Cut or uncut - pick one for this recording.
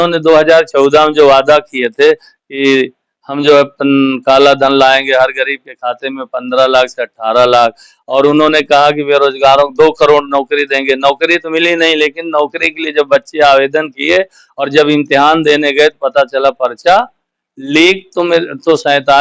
uncut